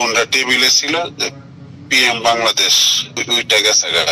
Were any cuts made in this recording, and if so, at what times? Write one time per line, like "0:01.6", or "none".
0:03.2